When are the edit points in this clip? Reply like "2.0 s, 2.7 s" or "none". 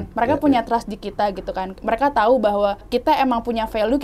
2.8 s

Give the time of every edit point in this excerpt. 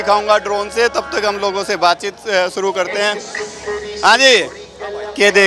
none

